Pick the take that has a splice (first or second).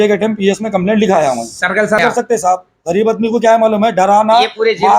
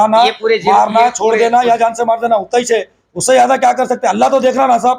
first